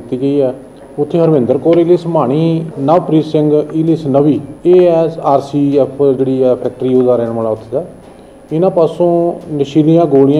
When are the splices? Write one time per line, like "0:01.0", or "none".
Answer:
0:02.7
0:04.5

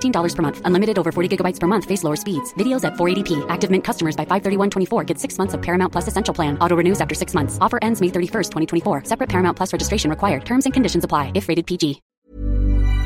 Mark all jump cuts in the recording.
0:12.0

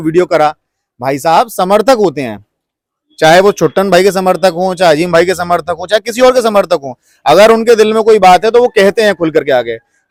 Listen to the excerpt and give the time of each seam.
none

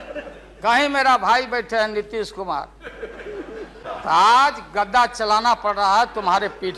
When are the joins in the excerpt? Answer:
0:03.8

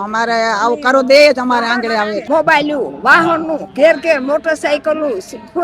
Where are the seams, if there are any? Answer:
0:02.2

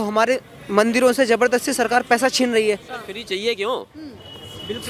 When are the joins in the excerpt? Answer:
0:03.2

